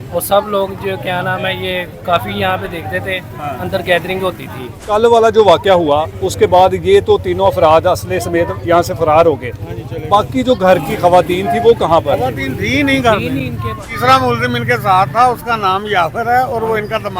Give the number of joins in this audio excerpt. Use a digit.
2